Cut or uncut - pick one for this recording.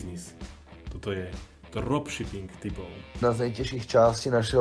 cut